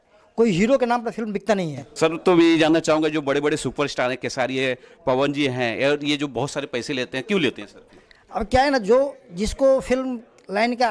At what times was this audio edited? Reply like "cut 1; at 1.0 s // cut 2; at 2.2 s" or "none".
cut 1; at 1.9 s